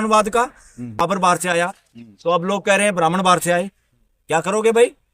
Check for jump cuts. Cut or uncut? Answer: cut